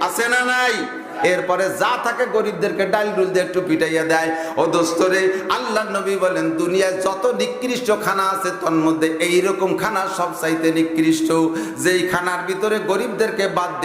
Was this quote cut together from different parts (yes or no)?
yes